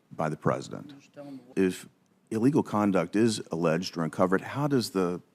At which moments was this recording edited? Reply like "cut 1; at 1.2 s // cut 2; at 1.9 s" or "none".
cut 1; at 1.5 s